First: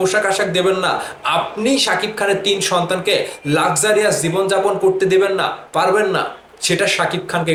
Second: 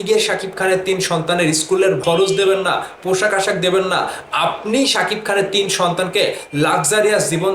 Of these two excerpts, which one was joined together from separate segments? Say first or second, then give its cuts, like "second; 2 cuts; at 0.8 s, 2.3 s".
second; 1 cut; at 2.0 s